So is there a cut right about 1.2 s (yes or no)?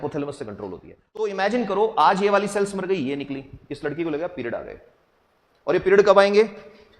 yes